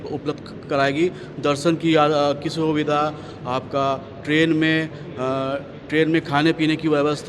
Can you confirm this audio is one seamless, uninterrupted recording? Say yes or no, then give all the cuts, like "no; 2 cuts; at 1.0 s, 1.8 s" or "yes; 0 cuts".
yes; 0 cuts